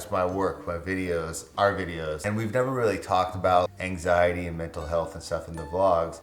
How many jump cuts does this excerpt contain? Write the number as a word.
one